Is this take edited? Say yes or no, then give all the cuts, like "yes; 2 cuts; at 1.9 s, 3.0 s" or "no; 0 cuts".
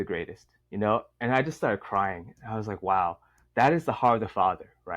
no; 0 cuts